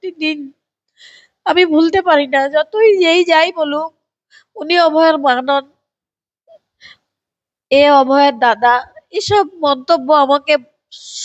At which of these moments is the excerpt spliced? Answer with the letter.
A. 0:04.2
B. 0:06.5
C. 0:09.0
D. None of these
D